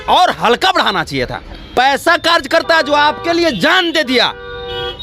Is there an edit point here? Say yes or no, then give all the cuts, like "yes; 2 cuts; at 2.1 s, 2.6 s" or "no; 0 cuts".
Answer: yes; 1 cut; at 1.8 s